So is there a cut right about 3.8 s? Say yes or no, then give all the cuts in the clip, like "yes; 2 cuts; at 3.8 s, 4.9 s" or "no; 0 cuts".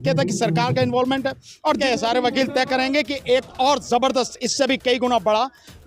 no; 1 cut; at 1.8 s